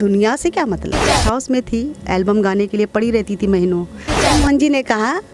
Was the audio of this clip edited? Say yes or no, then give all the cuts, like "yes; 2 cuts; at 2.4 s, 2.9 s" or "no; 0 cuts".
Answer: yes; 2 cuts; at 1.2 s, 4.3 s